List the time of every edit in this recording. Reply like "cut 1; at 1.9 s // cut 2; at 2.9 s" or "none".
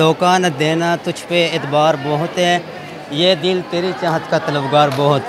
none